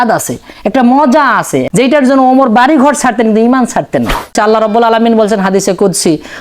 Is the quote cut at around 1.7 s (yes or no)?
yes